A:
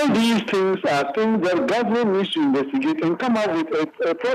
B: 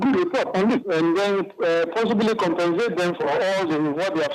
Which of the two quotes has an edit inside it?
B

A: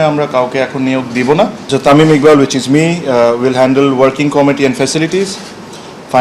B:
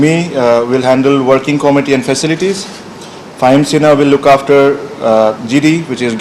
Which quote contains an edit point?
A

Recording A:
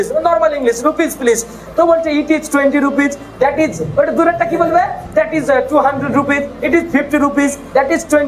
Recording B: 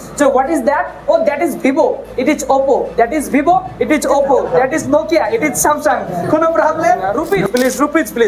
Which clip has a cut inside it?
B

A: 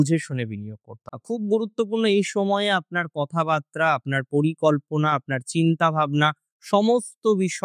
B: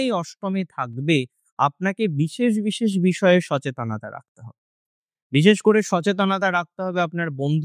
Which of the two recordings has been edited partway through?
A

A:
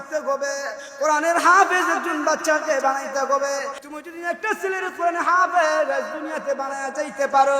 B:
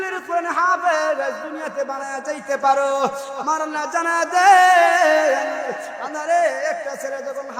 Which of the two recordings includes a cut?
A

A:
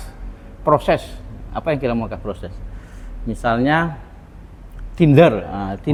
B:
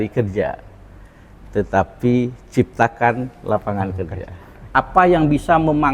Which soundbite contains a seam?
B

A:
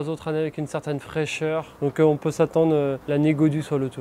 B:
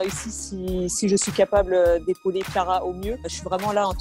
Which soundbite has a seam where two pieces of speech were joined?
A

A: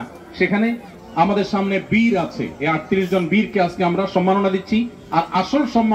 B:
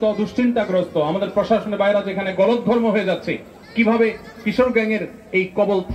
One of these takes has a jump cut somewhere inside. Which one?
A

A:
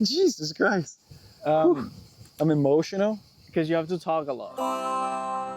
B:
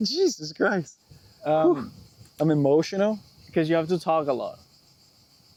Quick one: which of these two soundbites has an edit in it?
A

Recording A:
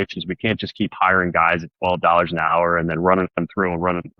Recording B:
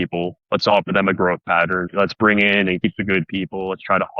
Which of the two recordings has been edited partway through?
B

